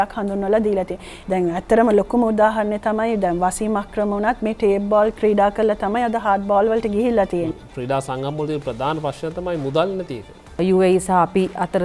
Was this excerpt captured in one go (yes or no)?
no